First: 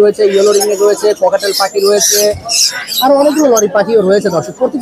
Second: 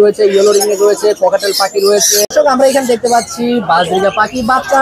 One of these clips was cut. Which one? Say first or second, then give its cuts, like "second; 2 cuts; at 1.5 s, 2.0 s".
second; 1 cut; at 2.2 s